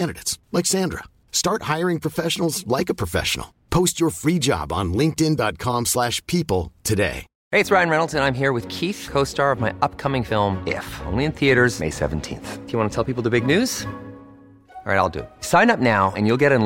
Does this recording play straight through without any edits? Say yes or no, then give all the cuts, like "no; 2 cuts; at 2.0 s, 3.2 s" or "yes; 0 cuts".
no; 1 cut; at 7.3 s